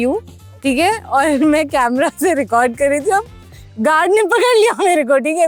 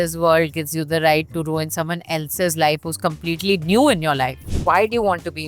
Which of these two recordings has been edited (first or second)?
second